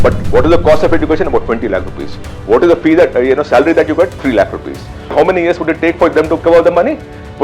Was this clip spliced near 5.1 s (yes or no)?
yes